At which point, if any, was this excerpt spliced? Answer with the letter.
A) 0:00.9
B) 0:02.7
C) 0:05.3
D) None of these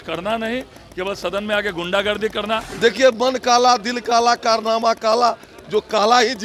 B